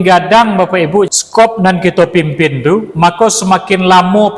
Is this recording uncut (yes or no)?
no